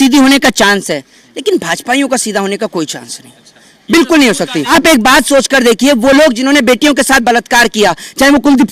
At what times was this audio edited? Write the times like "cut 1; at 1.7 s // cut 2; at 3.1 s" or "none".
cut 1; at 4.7 s